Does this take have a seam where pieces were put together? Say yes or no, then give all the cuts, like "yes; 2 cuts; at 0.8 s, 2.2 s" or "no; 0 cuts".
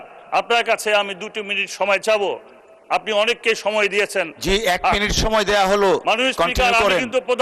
no; 0 cuts